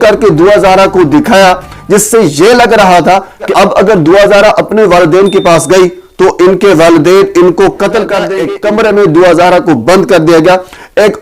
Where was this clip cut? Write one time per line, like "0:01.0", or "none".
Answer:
0:08.4

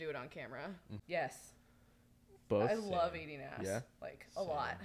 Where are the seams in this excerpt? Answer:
0:00.9

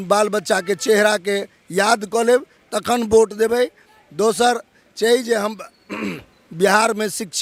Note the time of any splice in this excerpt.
none

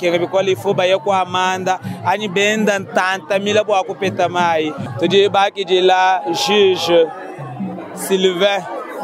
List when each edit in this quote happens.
0:04.8

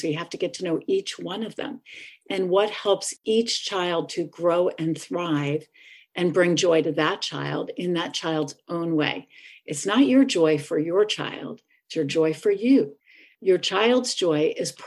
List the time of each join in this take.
none

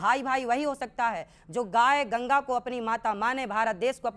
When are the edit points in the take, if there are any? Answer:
none

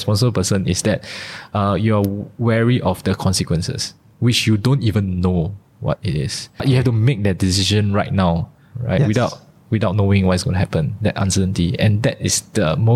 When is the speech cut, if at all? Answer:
none

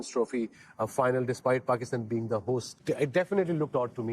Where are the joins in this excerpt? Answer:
0:02.7

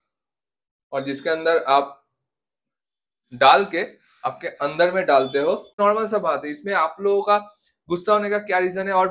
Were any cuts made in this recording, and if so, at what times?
0:05.8

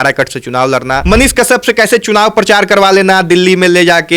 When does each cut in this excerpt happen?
0:01.0

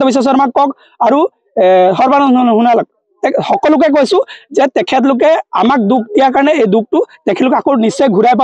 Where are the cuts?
none

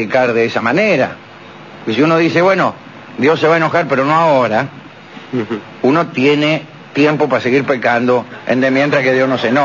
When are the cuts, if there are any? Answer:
0:01.9

